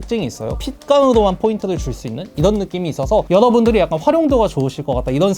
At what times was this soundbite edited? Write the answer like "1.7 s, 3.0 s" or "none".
3.3 s